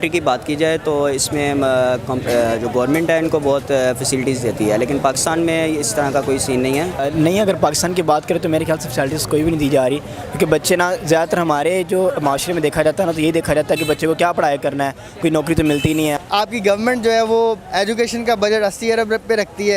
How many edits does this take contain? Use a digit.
2